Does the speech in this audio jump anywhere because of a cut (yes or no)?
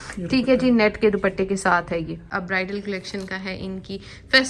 yes